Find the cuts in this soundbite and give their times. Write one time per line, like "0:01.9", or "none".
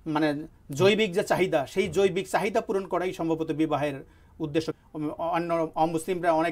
0:04.8